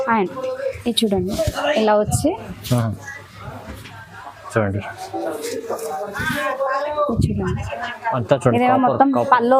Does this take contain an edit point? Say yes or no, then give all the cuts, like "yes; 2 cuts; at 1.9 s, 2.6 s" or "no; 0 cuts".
no; 0 cuts